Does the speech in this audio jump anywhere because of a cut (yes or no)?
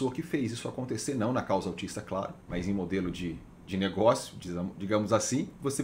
no